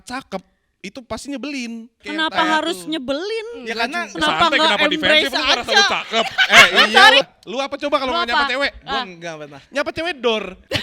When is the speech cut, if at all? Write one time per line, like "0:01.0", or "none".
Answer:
0:02.0
0:07.2